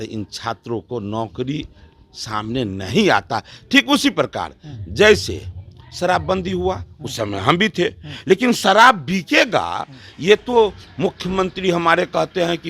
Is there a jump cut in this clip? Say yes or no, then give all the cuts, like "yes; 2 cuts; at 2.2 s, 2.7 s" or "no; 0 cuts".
no; 0 cuts